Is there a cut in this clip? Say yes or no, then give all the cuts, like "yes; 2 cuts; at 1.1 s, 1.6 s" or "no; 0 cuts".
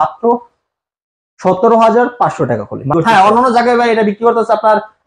yes; 1 cut; at 2.9 s